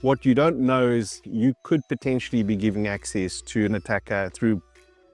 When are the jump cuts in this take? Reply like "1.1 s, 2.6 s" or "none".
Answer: 1.2 s